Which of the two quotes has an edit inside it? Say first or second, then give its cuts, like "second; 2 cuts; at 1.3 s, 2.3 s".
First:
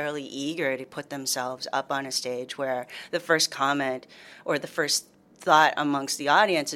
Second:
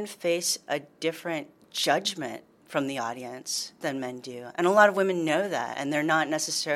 second; 1 cut; at 2.6 s